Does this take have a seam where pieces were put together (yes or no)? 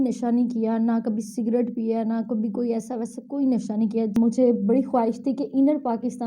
yes